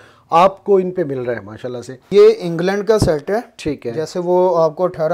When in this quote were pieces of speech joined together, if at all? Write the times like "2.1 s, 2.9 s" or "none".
2.0 s

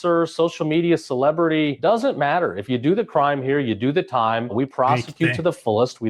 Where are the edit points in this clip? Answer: 4.5 s

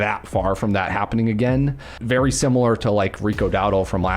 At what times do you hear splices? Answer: 1.9 s

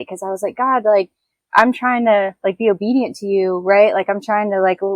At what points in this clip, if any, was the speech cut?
1.4 s

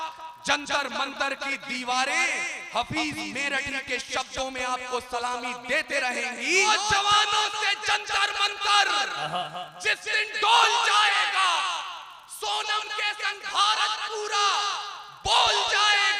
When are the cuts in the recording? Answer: 6.6 s

